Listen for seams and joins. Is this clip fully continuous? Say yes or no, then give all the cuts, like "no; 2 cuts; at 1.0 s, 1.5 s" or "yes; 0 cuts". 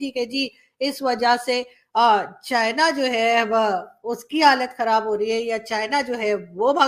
yes; 0 cuts